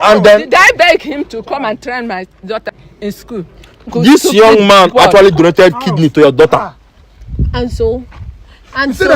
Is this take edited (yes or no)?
yes